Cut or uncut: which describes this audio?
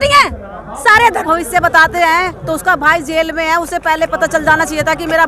cut